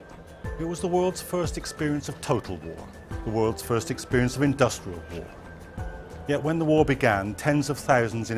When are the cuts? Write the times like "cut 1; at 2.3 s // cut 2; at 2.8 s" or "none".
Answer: cut 1; at 3.6 s